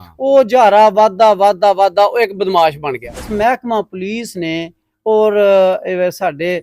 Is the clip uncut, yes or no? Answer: no